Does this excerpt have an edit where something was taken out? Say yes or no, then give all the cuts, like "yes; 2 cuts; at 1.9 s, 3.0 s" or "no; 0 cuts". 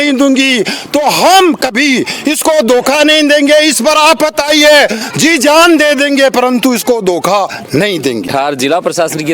yes; 1 cut; at 8.3 s